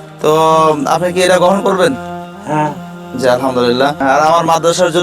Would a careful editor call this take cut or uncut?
cut